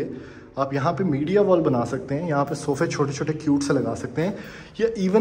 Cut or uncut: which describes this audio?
uncut